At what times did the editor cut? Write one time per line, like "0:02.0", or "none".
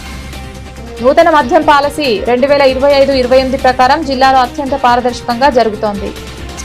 0:01.0